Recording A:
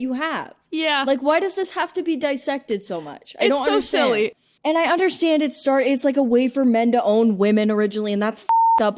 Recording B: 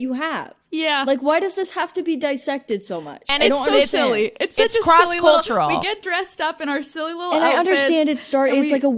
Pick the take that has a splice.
A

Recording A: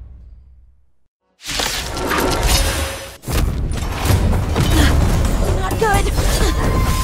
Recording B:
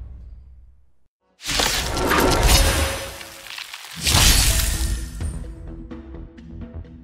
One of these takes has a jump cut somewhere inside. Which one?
A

